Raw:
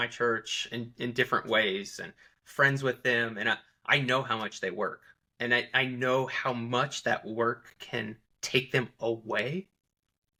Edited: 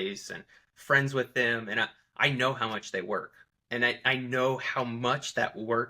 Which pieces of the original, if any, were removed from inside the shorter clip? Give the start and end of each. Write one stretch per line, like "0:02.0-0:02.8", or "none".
none